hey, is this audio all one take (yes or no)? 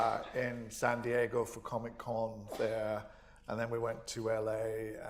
yes